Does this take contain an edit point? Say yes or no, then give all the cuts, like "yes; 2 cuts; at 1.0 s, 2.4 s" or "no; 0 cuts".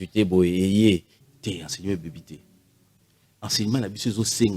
yes; 1 cut; at 1.1 s